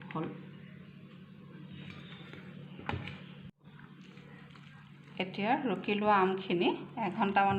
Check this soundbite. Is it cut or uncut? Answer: cut